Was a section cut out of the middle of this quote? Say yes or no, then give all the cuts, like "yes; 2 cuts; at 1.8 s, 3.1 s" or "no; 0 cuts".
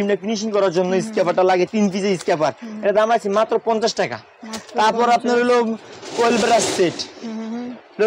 no; 0 cuts